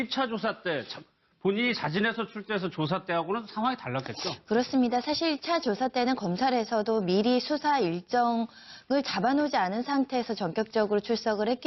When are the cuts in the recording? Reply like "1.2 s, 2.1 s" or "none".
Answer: 4.0 s